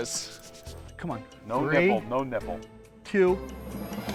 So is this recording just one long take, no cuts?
yes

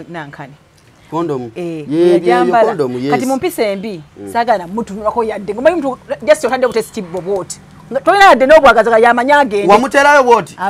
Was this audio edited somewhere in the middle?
no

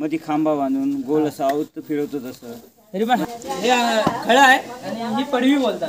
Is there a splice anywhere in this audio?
yes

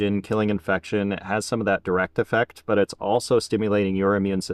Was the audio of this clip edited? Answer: no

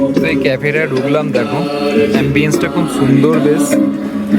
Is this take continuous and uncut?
yes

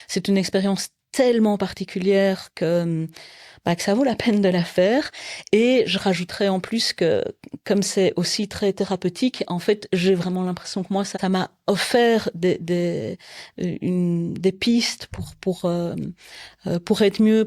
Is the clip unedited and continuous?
no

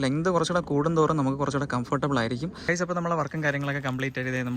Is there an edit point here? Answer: yes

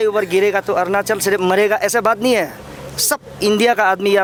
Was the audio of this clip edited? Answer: no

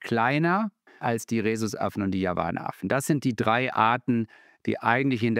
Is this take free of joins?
no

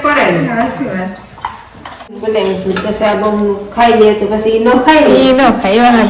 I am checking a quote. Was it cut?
yes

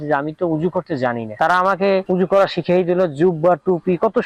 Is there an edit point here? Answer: no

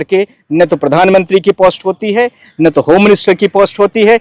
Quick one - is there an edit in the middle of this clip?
no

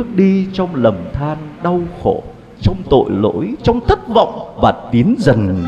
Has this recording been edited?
no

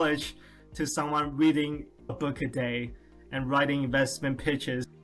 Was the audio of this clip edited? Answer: no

